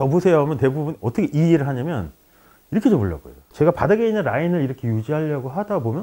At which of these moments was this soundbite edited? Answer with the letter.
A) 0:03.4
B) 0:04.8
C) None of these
A